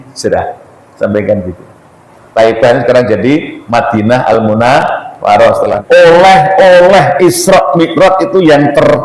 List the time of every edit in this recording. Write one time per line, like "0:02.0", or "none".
0:05.8